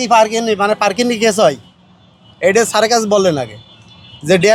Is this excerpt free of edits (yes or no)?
yes